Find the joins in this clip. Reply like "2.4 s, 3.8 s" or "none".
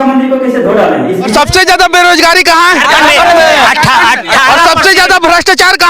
1.3 s